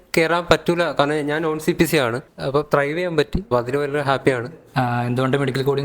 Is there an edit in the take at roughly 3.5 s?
yes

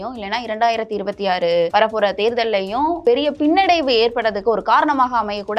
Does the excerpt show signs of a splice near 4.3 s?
no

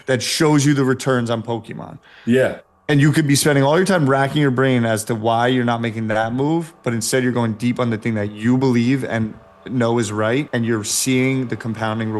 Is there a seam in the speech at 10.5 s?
yes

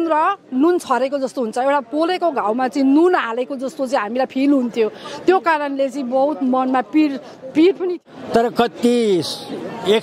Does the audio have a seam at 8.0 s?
yes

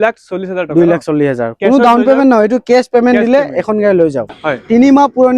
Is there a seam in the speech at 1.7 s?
no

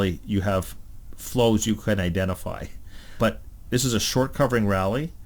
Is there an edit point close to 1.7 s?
no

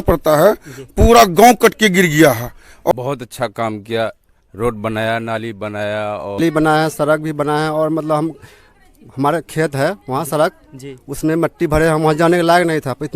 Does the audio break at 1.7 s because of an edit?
no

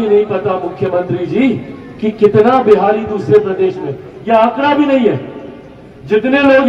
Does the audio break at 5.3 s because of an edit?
no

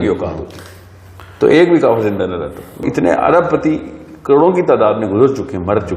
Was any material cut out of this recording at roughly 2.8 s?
yes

